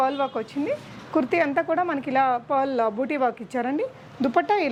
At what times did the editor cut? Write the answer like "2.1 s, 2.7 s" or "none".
none